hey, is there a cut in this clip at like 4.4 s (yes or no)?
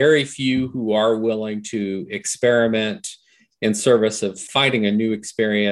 yes